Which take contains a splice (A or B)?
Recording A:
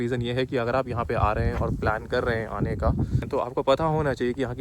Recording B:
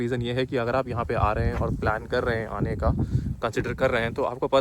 A